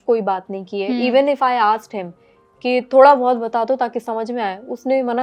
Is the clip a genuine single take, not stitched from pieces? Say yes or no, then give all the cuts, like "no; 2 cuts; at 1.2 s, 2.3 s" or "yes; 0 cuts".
yes; 0 cuts